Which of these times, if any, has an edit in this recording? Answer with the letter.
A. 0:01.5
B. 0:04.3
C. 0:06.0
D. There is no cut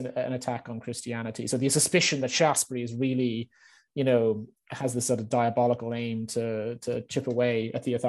D